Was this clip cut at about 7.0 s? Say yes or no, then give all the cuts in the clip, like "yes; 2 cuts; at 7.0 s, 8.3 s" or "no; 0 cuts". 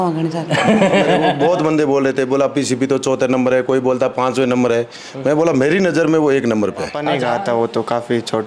yes; 2 cuts; at 1.3 s, 7.0 s